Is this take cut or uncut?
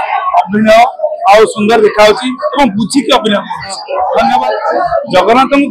cut